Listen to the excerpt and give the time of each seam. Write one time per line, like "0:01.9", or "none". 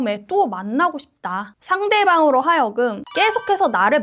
none